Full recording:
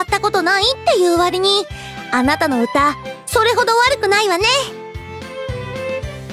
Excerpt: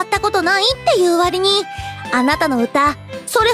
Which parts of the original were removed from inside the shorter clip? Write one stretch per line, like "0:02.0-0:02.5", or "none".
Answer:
none